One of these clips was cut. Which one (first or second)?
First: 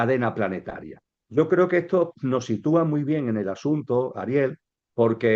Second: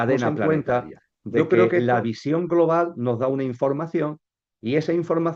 second